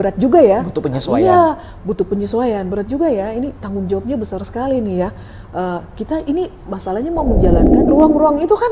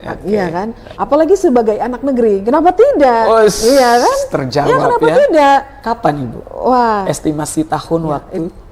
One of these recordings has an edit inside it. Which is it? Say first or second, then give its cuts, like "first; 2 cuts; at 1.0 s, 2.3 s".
first; 1 cut; at 7.7 s